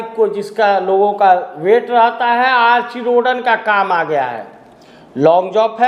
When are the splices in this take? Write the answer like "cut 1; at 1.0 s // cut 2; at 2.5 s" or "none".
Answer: none